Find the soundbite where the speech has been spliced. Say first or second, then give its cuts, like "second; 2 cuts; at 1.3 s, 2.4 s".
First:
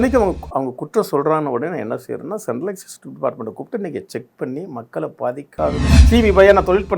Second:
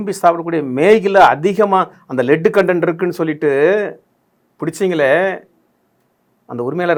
first; 1 cut; at 5.9 s